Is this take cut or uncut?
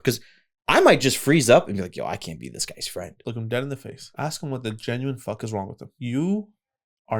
cut